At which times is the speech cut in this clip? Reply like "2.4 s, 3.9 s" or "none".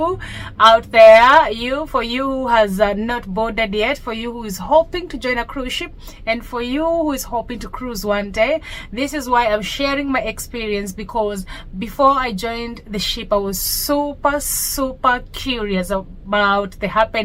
none